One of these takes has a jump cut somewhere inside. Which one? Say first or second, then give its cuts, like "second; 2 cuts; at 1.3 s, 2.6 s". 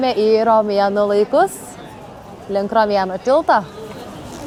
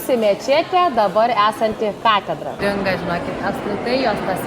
second; 1 cut; at 2.6 s